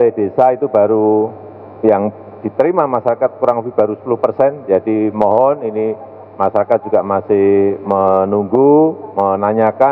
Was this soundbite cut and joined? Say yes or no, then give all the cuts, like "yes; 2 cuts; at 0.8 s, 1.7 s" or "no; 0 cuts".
no; 0 cuts